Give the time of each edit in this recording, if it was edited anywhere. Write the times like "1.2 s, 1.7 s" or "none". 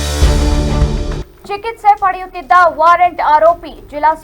1.3 s